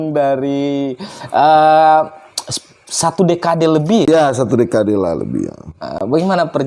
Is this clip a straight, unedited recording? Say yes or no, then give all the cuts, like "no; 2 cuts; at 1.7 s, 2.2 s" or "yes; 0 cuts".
no; 1 cut; at 4.1 s